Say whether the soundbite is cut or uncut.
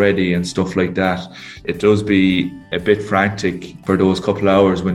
cut